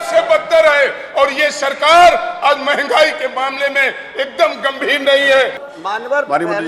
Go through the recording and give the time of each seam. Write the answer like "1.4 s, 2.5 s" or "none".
5.6 s